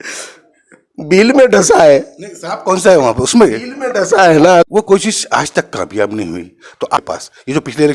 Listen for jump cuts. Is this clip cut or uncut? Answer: cut